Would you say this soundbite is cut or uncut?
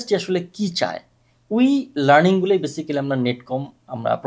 uncut